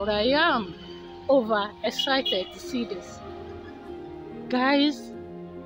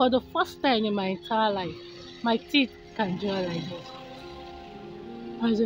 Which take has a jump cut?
first; 3 cuts; at 3.0 s, 4.5 s, 4.9 s

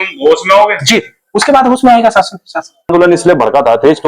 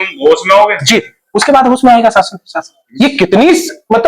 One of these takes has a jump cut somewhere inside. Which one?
first; 1 cut; at 2.9 s

